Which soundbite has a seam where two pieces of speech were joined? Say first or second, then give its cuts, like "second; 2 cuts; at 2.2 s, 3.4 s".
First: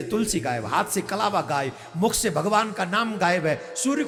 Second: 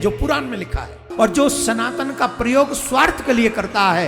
second; 1 cut; at 1.0 s